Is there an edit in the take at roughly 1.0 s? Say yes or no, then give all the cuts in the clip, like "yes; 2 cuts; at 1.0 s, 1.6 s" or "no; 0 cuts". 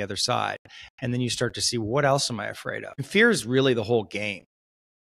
no; 1 cut; at 3.0 s